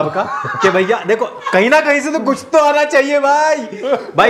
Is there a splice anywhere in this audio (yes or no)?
no